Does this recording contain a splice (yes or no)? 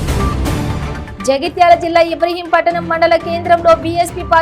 no